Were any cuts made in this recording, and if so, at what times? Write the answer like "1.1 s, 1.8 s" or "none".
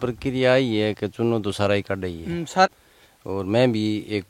2.7 s